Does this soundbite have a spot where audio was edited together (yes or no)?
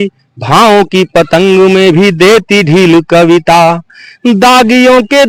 no